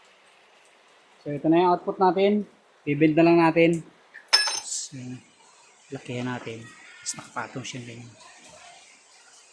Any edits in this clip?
yes; 1 cut; at 4.8 s

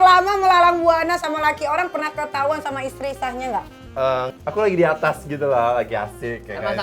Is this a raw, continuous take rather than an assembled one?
no; 1 cut; at 4.3 s

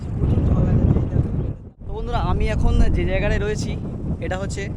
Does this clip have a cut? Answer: yes; 1 cut; at 1.7 s

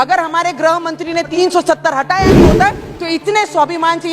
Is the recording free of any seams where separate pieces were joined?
no; 1 cut; at 1.3 s

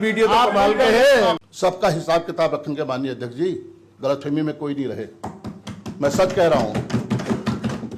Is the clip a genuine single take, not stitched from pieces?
no; 1 cut; at 1.4 s

